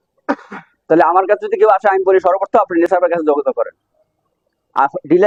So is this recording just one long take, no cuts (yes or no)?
yes